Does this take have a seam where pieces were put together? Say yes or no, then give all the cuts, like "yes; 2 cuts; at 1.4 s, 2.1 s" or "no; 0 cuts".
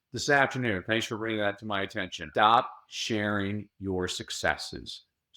yes; 1 cut; at 2.2 s